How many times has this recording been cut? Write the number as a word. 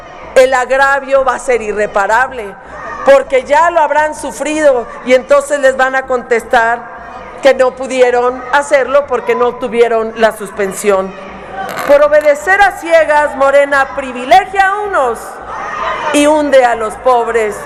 zero